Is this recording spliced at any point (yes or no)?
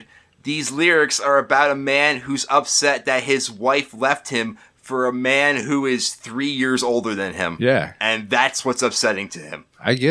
no